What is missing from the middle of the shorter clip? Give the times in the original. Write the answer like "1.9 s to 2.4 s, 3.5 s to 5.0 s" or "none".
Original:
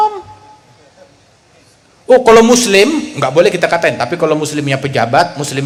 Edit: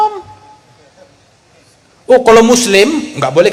none